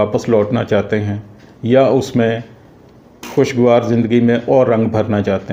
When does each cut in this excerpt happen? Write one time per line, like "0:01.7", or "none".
none